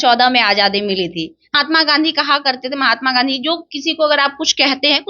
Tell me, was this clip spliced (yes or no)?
yes